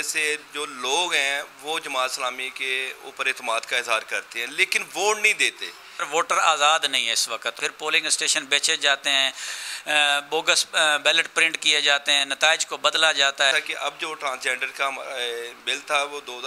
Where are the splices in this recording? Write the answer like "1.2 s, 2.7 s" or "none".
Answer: 6.1 s, 7.6 s, 13.5 s